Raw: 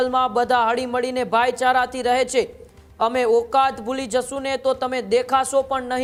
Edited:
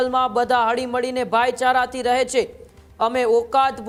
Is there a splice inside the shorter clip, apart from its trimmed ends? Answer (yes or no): no